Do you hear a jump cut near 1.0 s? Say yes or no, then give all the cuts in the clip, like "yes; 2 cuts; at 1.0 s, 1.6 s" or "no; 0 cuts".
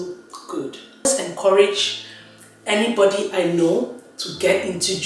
yes; 1 cut; at 1.0 s